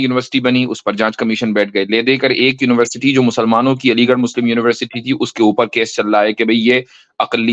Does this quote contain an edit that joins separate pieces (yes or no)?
no